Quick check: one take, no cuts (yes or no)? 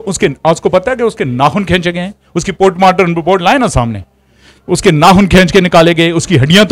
yes